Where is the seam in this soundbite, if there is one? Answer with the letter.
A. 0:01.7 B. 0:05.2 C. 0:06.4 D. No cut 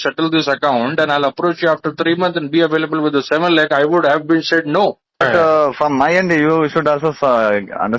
B